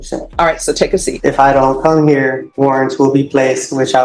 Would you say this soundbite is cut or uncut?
cut